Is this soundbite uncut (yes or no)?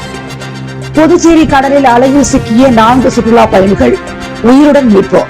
no